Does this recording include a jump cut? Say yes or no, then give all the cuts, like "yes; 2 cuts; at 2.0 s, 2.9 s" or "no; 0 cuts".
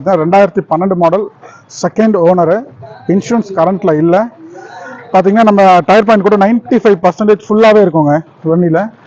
no; 0 cuts